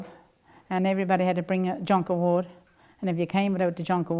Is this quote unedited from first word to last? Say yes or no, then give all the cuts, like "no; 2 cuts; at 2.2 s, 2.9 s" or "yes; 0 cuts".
yes; 0 cuts